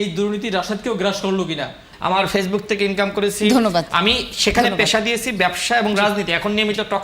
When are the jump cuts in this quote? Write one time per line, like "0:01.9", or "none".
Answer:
0:01.9